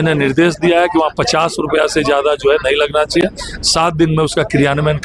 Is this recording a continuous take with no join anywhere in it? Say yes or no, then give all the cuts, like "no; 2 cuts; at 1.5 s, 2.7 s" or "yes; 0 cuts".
yes; 0 cuts